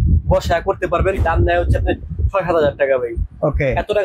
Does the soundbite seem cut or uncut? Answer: cut